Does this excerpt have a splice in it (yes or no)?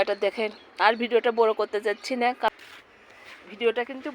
yes